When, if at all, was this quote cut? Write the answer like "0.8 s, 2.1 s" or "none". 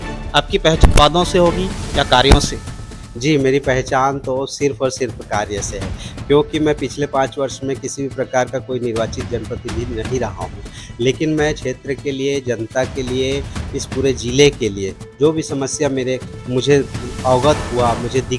none